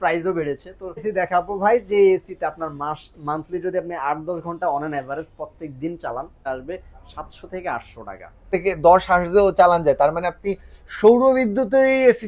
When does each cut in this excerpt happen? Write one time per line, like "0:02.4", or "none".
0:01.1
0:06.5
0:08.4